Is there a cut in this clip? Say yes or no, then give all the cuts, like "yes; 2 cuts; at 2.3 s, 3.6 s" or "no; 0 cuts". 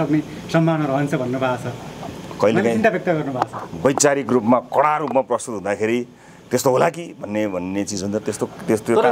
no; 0 cuts